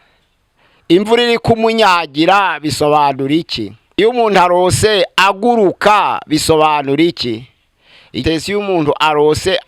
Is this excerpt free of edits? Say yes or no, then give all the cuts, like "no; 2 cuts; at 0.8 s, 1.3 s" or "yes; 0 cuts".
no; 2 cuts; at 4.0 s, 8.2 s